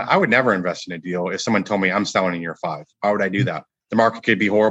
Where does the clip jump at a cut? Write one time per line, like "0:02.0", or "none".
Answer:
0:02.9
0:03.7